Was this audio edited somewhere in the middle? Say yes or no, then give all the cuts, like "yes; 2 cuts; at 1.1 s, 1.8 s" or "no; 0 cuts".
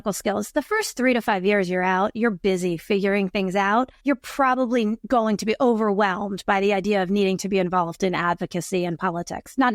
yes; 1 cut; at 3.9 s